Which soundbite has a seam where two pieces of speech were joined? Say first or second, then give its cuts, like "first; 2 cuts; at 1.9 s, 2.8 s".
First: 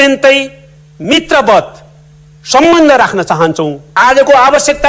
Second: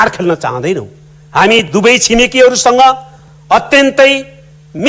first; 1 cut; at 3.9 s